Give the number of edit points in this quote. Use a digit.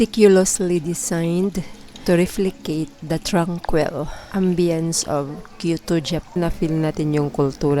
1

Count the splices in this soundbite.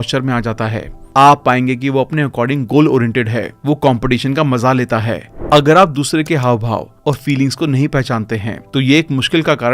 1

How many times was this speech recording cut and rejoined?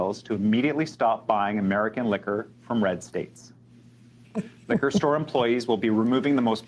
0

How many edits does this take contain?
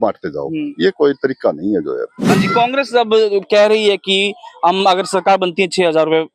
1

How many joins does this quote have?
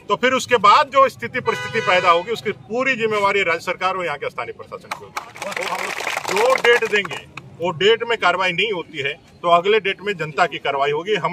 1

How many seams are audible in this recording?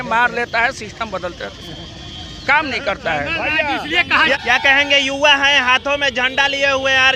0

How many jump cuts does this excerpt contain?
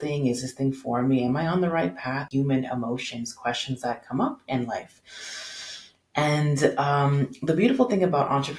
1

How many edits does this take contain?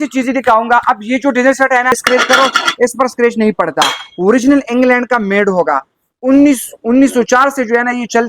1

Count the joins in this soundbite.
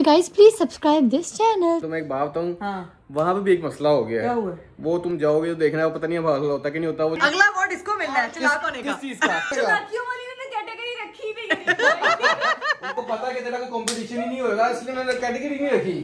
3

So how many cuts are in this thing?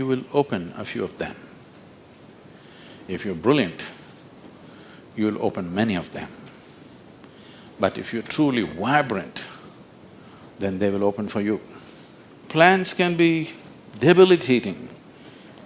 1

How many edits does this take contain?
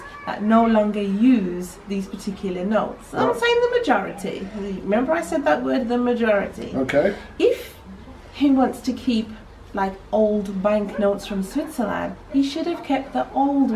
0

